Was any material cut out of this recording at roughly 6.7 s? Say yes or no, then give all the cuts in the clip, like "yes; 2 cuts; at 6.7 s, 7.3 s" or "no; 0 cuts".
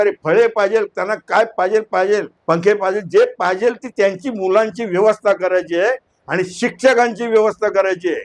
no; 1 cut; at 2.3 s